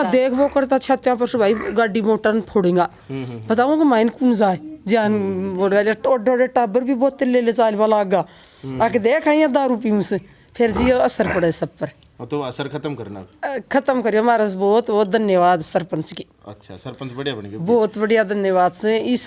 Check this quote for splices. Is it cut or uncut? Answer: uncut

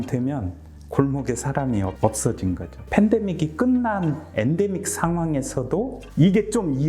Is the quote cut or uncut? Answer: cut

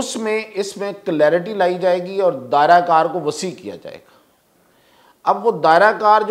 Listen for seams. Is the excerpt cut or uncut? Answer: uncut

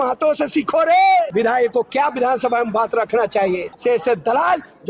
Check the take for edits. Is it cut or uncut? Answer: cut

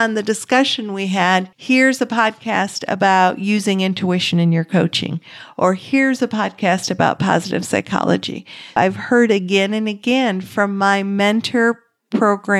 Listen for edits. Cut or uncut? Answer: cut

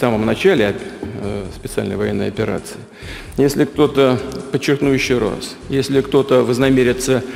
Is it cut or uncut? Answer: uncut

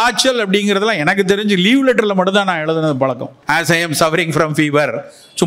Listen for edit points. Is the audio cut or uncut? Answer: cut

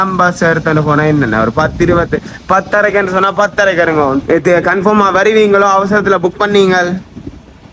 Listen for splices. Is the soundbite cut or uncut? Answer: cut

